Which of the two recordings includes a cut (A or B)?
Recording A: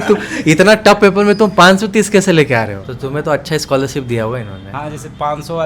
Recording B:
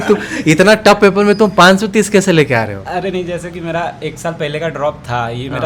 A